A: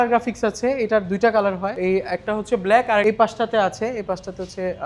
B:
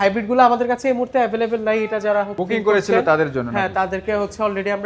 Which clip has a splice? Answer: A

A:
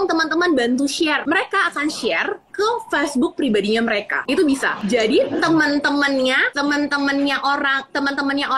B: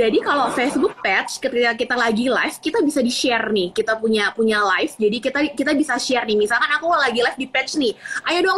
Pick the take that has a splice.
A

